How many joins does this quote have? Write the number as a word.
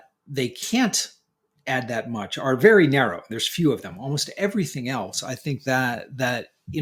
zero